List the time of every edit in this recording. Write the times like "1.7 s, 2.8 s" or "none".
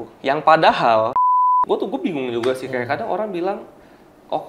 1.4 s